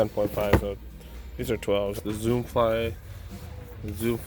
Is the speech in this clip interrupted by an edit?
yes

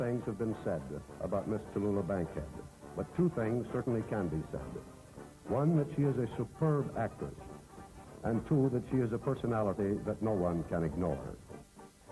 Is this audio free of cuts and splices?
yes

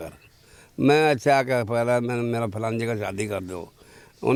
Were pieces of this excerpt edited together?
no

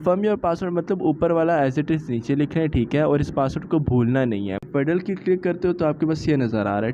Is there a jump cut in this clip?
yes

